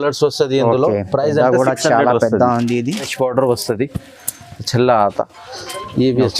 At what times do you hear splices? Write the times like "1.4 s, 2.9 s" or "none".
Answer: 3.1 s